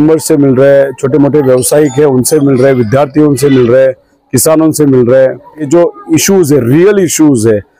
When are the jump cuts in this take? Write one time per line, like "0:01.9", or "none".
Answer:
0:05.7